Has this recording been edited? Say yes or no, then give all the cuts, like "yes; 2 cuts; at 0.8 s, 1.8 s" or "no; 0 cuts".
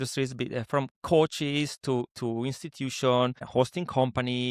yes; 2 cuts; at 1.0 s, 3.4 s